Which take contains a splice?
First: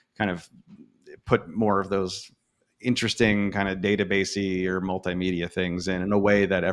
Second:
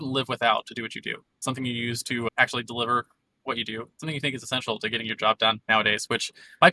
second; 1 cut; at 1.4 s

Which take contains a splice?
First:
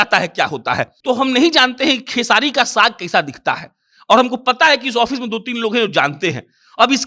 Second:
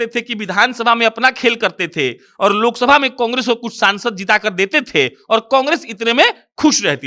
first; 1 cut; at 0.9 s

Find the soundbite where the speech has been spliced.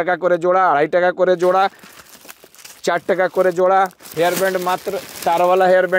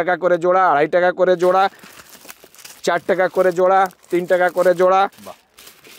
first; 1 cut; at 4.0 s

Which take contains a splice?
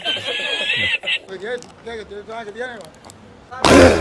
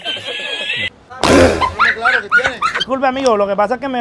second; 2 cuts; at 0.9 s, 2.8 s

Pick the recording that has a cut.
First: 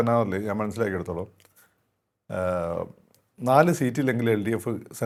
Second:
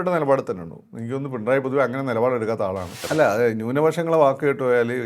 second; 1 cut; at 3.0 s

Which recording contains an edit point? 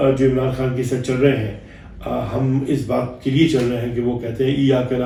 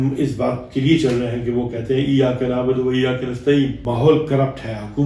second; 1 cut; at 3.8 s

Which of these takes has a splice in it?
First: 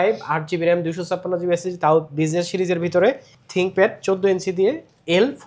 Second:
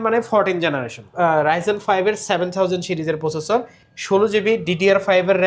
second; 1 cut; at 1.0 s

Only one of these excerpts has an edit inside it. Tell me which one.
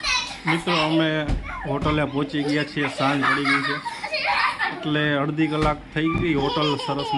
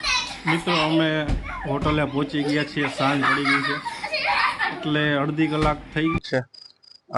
second; 1 cut; at 6.2 s

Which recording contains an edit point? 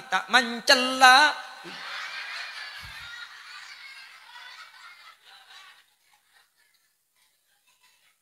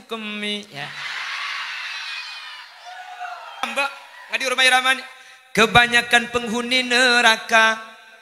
second; 1 cut; at 3.6 s

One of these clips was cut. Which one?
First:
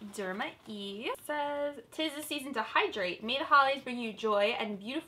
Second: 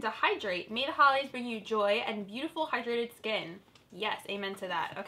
first; 1 cut; at 1.2 s

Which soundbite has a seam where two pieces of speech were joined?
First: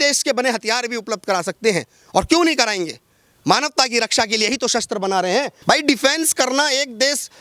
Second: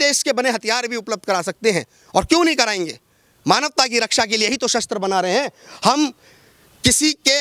first; 1 cut; at 5.5 s

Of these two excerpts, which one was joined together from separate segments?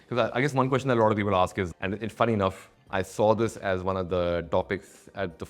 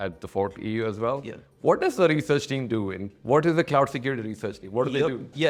first; 1 cut; at 1.7 s

